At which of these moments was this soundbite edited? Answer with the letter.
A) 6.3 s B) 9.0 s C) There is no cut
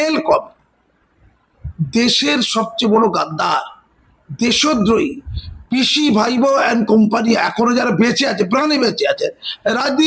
C